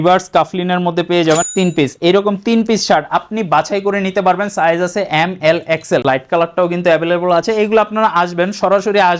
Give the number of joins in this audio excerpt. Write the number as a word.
two